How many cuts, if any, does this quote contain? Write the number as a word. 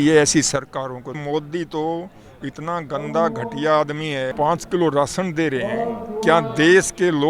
two